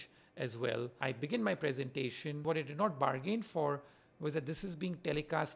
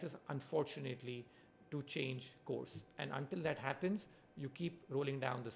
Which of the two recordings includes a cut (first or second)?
first